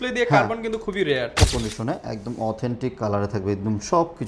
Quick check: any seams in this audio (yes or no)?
yes